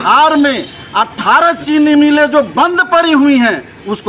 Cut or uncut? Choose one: uncut